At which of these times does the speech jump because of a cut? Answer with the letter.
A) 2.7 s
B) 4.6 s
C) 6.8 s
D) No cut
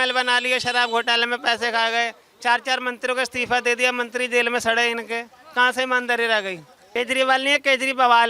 C